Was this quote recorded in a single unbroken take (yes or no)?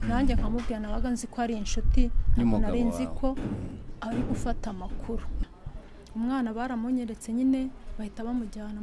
no